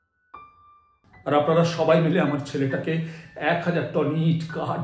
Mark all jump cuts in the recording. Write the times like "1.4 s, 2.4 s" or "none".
1.0 s